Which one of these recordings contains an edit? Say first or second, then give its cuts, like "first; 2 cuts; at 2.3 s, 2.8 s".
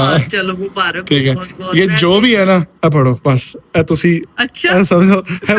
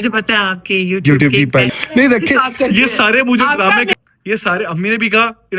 second; 2 cuts; at 1.7 s, 3.9 s